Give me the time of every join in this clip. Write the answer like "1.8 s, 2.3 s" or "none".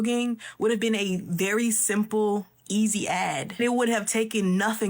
3.5 s

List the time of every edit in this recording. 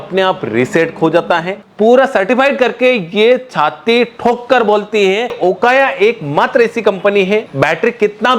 1.6 s, 5.4 s, 7.5 s

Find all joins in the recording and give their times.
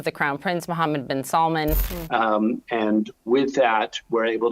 1.9 s

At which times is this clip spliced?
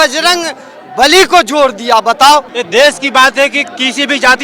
2.6 s

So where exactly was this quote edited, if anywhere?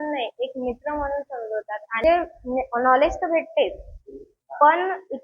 2.0 s

